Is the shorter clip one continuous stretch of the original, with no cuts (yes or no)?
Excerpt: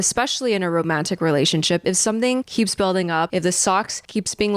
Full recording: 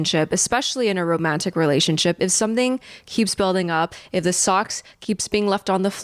no